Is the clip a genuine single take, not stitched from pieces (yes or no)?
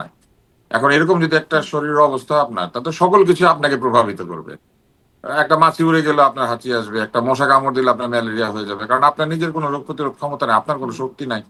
yes